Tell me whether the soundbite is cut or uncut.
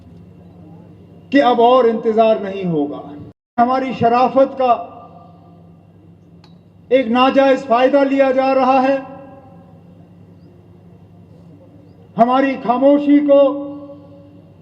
cut